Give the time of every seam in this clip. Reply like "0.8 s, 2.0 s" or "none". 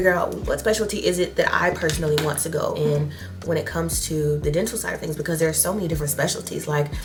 none